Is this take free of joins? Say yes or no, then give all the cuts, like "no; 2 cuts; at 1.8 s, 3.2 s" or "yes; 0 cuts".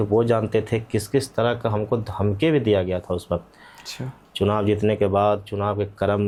yes; 0 cuts